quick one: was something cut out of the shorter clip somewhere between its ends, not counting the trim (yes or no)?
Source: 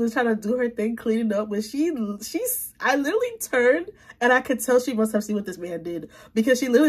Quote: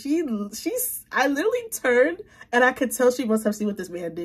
no